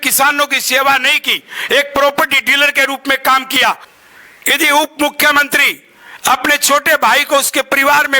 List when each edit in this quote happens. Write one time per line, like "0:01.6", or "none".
0:03.9